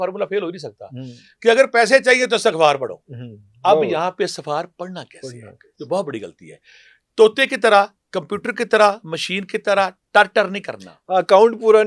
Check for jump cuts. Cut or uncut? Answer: uncut